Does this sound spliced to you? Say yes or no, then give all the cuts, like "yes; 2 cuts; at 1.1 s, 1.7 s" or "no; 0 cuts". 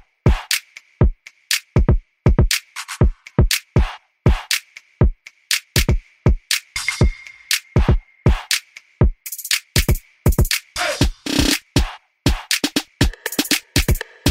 no; 0 cuts